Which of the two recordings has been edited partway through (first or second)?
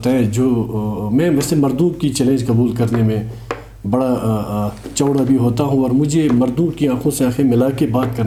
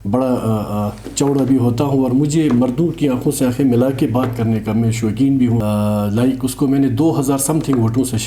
second